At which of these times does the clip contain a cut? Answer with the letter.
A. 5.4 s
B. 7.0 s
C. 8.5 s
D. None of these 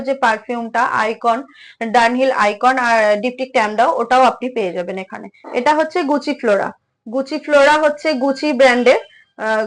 A